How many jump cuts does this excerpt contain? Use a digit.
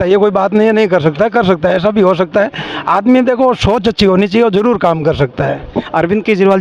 0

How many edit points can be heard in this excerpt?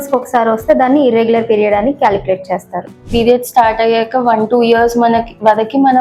1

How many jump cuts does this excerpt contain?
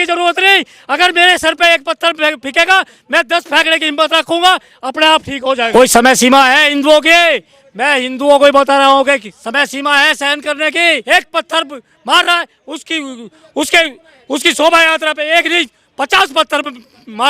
2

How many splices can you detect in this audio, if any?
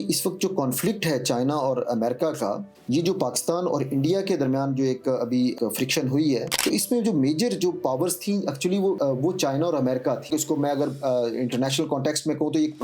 3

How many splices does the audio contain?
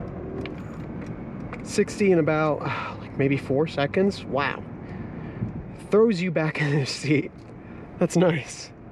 0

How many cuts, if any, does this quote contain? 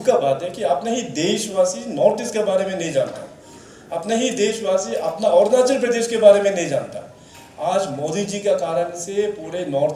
0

